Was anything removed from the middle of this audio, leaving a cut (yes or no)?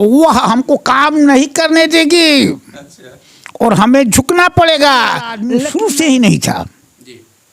yes